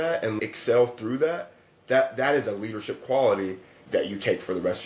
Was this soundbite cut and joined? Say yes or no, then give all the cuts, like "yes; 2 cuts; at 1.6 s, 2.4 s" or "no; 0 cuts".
yes; 1 cut; at 3.7 s